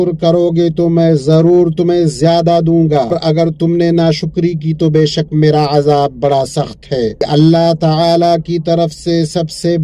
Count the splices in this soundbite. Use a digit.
2